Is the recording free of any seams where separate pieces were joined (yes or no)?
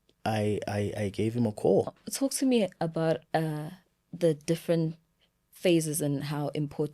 no